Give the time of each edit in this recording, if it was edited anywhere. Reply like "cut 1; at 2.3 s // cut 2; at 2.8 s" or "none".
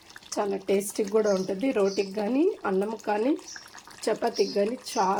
none

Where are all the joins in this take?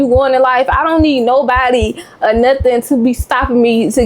none

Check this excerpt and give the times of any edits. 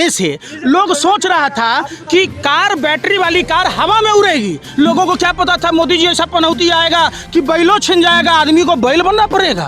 none

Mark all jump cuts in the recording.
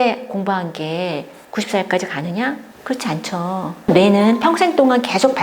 cut 1; at 1.4 s // cut 2; at 2.7 s // cut 3; at 3.9 s

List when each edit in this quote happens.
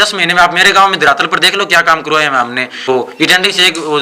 cut 1; at 2.9 s

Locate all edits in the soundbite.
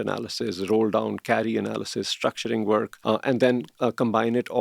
cut 1; at 2.9 s // cut 2; at 3.7 s

